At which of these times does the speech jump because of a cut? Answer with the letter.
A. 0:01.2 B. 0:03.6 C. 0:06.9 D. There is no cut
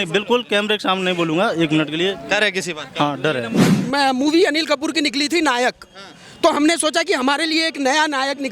B